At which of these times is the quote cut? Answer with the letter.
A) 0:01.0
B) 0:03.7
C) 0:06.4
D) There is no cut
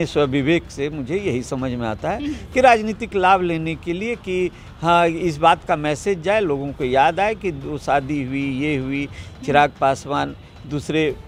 D